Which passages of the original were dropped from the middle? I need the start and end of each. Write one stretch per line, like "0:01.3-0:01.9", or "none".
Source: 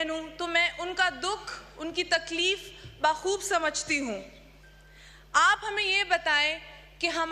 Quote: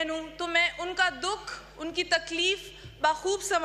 none

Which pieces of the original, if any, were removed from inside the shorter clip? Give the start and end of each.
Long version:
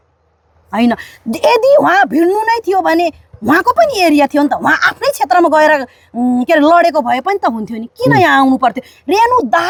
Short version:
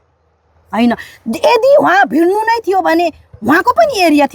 none

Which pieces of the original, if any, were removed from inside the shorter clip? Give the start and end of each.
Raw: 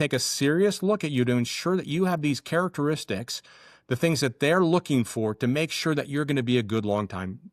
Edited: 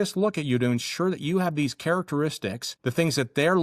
0:03.3-0:03.7

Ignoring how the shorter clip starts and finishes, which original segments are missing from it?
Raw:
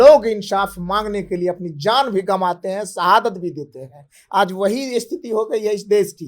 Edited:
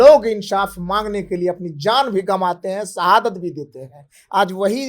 none

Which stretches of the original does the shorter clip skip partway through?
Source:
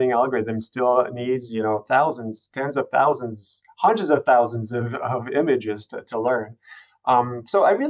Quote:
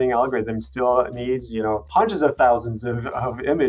0:01.8-0:03.7

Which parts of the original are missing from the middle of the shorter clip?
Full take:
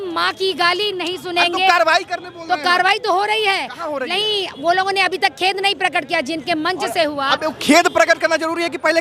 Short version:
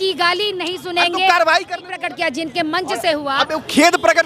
0:02.3-0:05.9

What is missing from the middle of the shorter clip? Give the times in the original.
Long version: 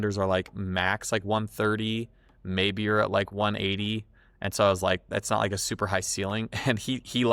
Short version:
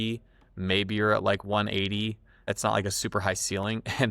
0:04.3-0:05.1

